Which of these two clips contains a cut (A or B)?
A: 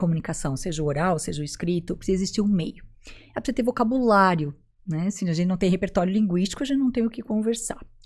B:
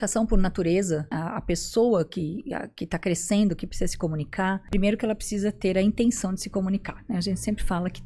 B